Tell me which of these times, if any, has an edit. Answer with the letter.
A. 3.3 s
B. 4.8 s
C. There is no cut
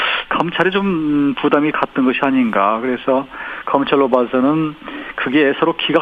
A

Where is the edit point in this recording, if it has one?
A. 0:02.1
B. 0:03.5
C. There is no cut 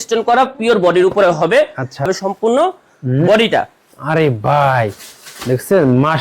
A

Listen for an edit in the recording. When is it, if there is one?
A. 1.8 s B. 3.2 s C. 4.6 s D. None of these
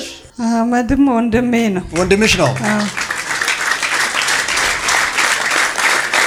D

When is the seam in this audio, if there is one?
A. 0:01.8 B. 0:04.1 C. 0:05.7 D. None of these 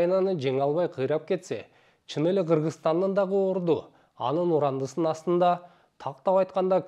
D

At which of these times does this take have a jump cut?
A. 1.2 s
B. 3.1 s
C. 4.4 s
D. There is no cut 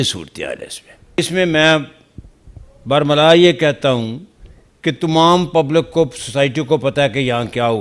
A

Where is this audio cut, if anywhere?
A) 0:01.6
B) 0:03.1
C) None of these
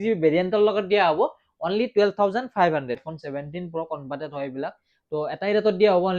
B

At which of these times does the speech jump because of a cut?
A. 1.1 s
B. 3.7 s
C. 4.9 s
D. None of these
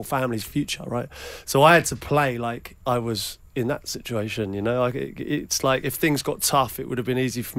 D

